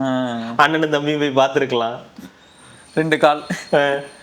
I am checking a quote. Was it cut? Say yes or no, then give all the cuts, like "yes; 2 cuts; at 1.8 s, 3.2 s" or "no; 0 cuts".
no; 0 cuts